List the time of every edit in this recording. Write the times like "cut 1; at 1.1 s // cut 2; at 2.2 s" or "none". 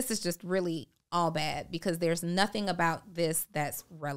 none